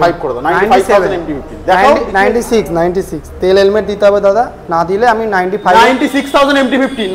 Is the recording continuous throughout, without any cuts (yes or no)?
yes